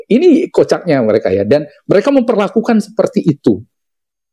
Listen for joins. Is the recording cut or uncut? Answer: uncut